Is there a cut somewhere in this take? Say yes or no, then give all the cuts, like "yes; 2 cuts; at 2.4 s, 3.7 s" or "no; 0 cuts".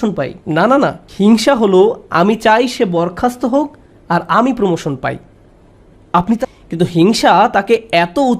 yes; 1 cut; at 6.4 s